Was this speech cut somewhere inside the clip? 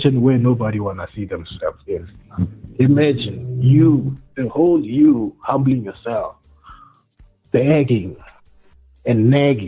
no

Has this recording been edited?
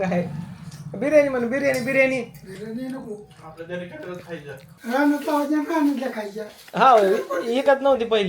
yes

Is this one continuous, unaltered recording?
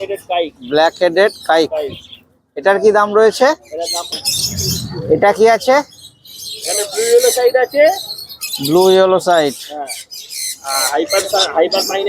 no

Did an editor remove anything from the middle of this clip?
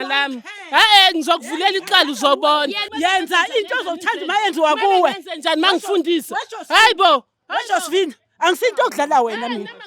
yes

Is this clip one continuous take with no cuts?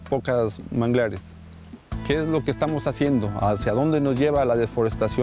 yes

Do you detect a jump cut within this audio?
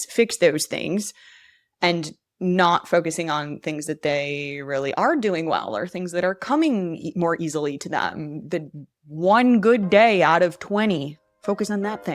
yes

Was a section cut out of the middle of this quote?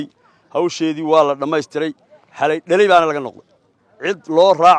no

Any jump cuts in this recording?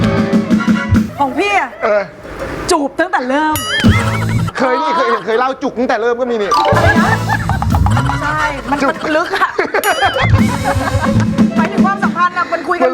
yes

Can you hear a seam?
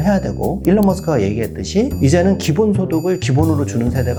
no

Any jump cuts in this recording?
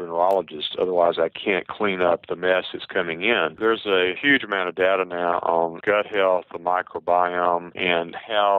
yes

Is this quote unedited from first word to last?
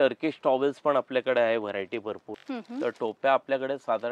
no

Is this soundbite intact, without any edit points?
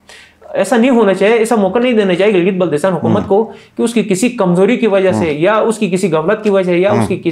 yes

